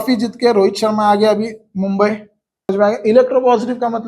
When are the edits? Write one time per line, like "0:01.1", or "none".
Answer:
0:02.7